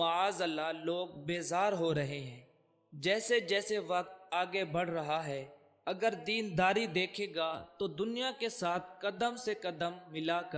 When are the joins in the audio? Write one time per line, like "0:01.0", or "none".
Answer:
none